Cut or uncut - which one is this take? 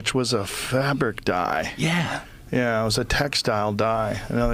uncut